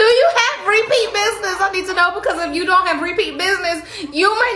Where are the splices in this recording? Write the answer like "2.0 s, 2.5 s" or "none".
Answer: none